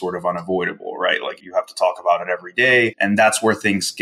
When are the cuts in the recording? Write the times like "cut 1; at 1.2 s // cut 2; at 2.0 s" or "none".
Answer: cut 1; at 1.4 s // cut 2; at 3.0 s